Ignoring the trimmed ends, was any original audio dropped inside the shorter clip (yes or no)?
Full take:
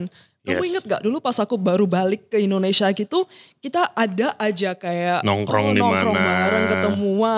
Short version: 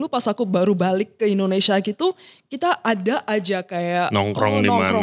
no